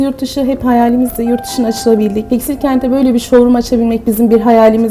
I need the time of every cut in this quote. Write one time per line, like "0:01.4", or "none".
0:02.2